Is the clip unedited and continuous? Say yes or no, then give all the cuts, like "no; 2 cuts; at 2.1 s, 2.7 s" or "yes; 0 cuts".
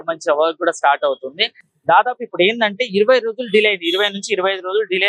yes; 0 cuts